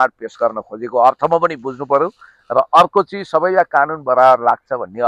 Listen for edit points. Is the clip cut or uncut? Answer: uncut